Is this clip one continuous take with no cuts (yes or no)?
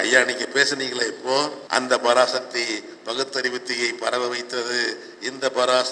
no